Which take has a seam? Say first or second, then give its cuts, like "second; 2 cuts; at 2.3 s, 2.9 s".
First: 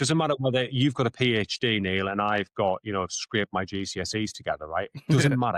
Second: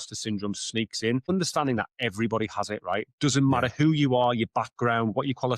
second; 1 cut; at 1.3 s